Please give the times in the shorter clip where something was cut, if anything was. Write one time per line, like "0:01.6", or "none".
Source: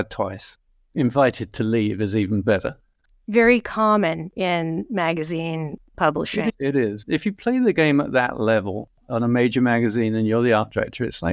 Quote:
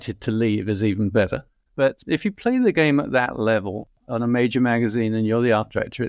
0:01.9